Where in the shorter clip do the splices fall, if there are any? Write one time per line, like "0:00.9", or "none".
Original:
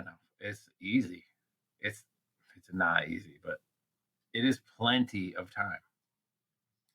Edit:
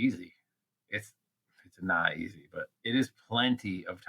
0:02.7